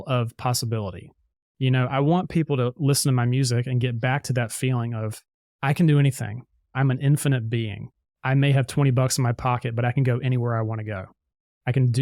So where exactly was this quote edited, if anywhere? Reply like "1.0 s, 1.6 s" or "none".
6.7 s